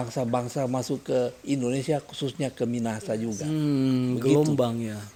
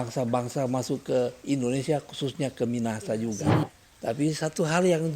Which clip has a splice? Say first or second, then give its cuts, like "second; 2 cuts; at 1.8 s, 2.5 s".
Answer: second; 1 cut; at 3.6 s